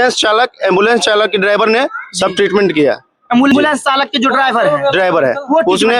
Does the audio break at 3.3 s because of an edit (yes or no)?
no